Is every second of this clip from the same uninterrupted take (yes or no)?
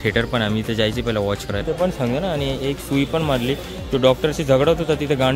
no